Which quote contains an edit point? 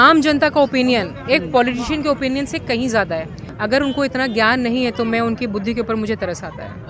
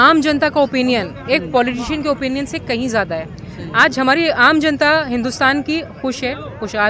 first; 1 cut; at 3.5 s

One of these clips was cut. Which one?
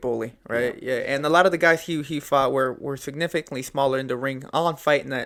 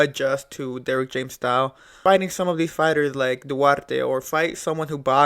second; 1 cut; at 2.0 s

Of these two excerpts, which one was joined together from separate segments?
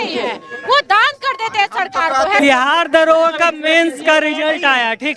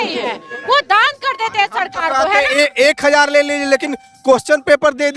first; 1 cut; at 2.4 s

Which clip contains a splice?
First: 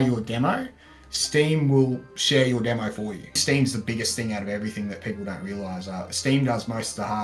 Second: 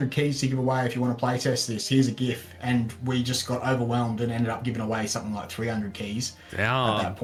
first; 1 cut; at 3.4 s

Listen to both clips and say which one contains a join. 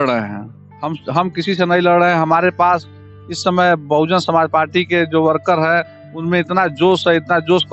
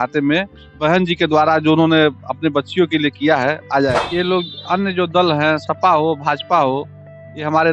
second; 1 cut; at 4.0 s

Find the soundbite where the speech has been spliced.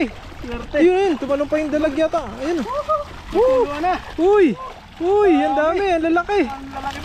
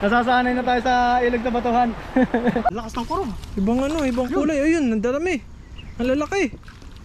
second; 1 cut; at 2.7 s

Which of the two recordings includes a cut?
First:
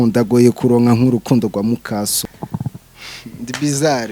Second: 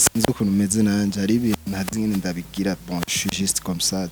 first; 1 cut; at 2.2 s

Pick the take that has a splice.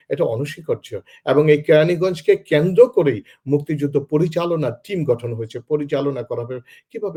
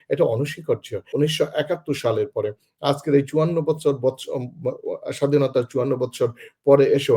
second; 1 cut; at 1.1 s

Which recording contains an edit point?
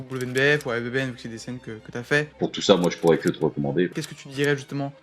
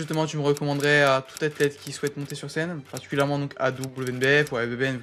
first; 2 cuts; at 2.4 s, 4.0 s

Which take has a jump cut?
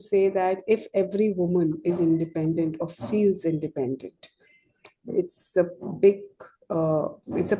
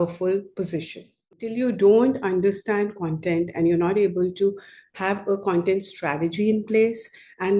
second; 1 cut; at 1.5 s

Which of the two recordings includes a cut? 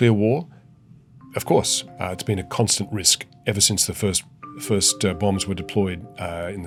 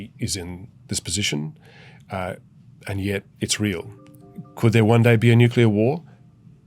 second; 1 cut; at 4.2 s

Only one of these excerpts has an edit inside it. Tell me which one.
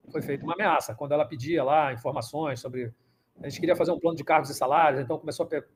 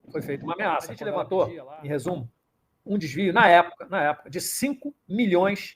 second; 1 cut; at 1.0 s

